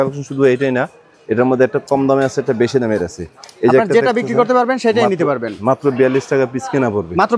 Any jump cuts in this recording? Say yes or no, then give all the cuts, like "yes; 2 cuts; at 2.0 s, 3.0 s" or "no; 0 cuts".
no; 0 cuts